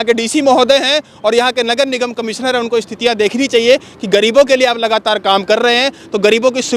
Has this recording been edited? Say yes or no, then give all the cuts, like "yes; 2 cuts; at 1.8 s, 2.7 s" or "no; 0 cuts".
no; 0 cuts